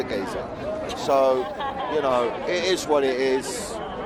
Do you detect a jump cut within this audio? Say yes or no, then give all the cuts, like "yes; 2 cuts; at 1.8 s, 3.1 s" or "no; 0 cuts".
no; 0 cuts